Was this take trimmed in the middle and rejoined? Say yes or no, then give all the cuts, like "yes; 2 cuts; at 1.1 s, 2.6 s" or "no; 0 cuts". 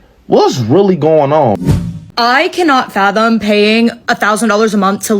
yes; 1 cut; at 1.6 s